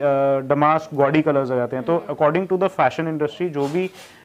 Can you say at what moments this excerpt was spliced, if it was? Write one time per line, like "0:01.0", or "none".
none